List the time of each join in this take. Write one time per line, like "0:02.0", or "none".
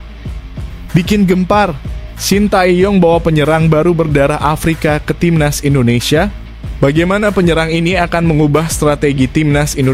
0:00.9